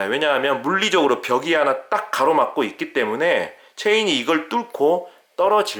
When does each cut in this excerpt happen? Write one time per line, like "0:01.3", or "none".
none